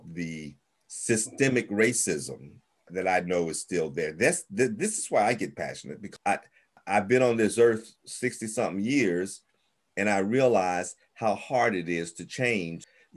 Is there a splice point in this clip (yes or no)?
no